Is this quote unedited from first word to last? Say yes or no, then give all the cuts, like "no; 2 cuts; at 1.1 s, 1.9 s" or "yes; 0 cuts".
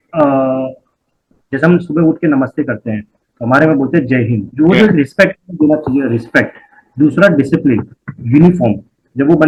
yes; 0 cuts